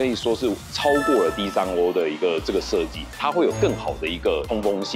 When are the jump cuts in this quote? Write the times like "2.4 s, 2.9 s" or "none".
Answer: 3.2 s